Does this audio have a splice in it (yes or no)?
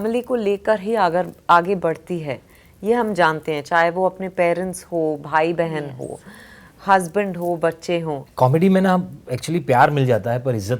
yes